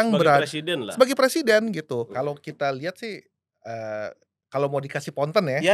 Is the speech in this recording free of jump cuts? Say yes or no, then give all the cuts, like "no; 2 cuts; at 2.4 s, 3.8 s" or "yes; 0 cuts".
no; 1 cut; at 2.1 s